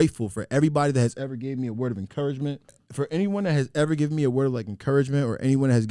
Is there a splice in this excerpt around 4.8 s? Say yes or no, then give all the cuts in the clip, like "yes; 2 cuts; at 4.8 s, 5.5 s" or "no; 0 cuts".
no; 1 cut; at 2.8 s